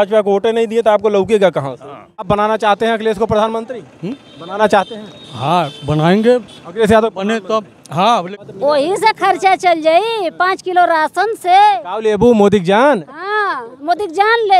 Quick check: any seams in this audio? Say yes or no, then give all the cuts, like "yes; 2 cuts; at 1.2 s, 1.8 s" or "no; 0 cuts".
yes; 2 cuts; at 2.3 s, 8.3 s